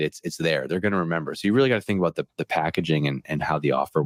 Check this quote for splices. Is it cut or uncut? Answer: uncut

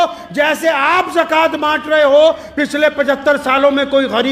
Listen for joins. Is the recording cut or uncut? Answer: uncut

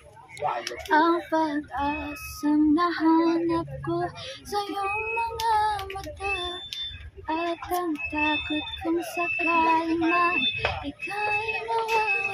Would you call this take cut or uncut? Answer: uncut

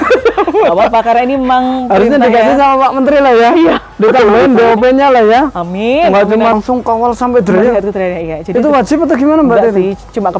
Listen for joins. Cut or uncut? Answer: cut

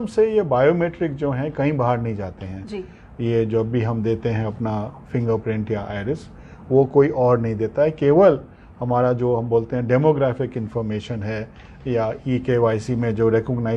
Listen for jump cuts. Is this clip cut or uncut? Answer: uncut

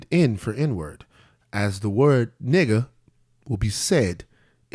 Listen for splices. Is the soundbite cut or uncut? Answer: uncut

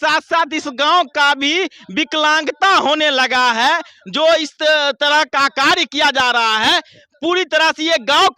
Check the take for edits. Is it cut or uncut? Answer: uncut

